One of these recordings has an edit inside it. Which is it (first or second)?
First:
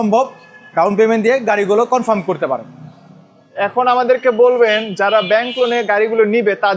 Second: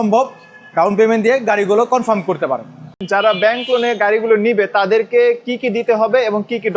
second